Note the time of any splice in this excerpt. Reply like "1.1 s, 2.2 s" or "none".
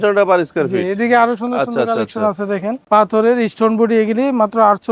2.8 s